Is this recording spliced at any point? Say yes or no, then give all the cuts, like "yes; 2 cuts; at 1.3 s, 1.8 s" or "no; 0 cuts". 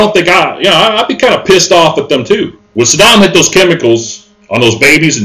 yes; 1 cut; at 2.6 s